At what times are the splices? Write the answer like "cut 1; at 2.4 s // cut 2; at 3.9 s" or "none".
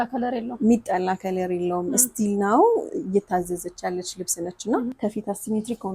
cut 1; at 4.9 s